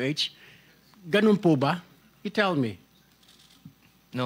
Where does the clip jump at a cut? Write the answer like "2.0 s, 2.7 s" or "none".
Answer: none